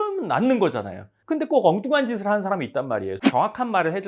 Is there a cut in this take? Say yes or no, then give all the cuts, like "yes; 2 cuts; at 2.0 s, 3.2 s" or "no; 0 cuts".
yes; 1 cut; at 3.2 s